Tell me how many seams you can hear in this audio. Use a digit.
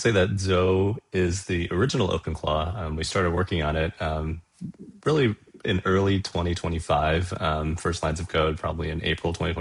0